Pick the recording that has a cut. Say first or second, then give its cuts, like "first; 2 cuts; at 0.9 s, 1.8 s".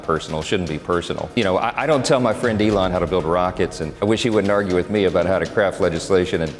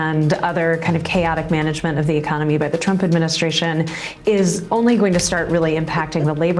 first; 3 cuts; at 1.3 s, 2.9 s, 3.8 s